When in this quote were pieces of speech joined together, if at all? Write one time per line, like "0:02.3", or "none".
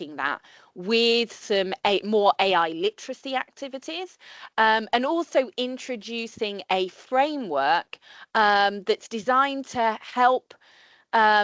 none